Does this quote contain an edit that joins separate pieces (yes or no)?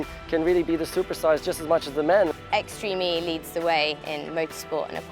yes